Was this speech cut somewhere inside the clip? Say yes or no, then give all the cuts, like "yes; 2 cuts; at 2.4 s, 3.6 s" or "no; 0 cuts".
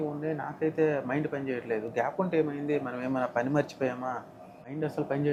no; 0 cuts